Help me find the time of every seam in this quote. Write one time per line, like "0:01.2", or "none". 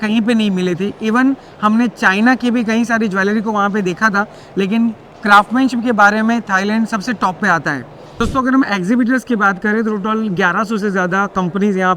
0:08.2